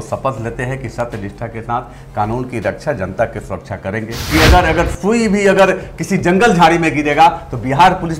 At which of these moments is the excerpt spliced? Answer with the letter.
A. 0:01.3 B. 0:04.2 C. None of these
B